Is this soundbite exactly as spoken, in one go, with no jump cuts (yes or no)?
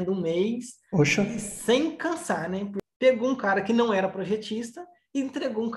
no